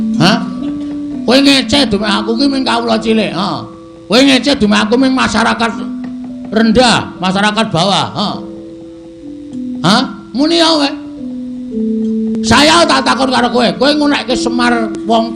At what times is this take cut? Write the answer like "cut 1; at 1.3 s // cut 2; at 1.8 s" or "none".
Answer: none